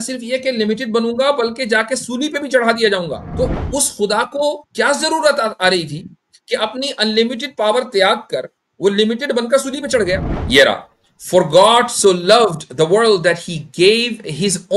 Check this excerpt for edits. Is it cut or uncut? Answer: cut